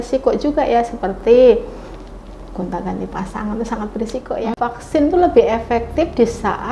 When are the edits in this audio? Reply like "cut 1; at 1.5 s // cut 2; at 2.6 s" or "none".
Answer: cut 1; at 4.5 s

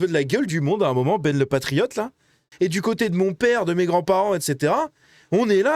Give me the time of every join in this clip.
cut 1; at 2.4 s

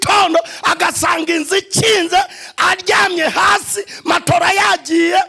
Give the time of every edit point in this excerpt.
none

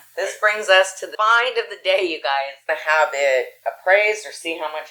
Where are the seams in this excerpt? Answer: cut 1; at 1.0 s // cut 2; at 2.7 s

